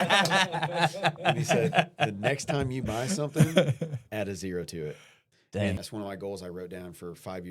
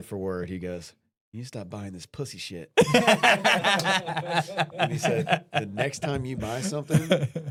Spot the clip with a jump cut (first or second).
first